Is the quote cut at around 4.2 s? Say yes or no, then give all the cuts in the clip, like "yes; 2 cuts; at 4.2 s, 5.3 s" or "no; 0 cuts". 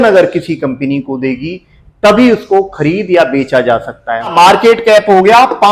yes; 1 cut; at 4.2 s